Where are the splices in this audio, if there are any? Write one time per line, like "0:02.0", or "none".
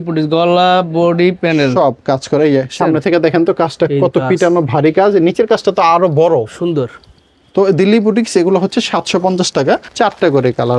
none